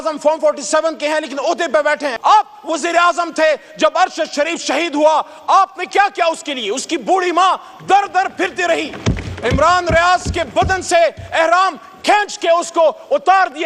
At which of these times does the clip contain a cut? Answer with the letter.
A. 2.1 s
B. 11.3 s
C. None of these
A